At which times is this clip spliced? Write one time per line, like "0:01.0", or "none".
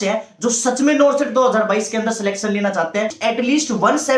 0:03.1